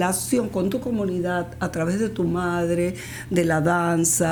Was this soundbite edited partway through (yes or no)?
no